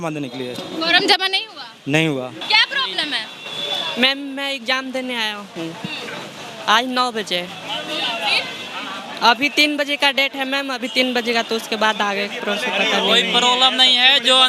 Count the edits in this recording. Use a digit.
1